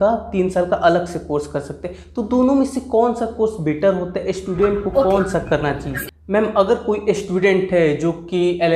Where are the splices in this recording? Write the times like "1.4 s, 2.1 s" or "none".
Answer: 5.9 s